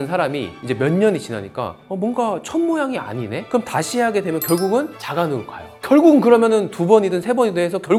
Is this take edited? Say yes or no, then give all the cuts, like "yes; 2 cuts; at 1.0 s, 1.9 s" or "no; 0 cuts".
no; 0 cuts